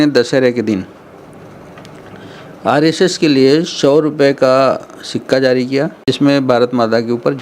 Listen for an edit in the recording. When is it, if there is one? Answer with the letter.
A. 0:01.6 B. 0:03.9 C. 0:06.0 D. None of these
C